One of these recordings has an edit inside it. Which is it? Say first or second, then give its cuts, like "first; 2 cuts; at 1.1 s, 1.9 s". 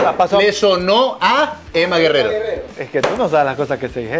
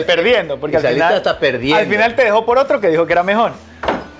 first; 2 cuts; at 1.6 s, 2.7 s